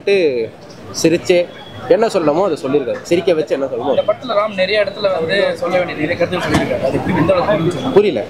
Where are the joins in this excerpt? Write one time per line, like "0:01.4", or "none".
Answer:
none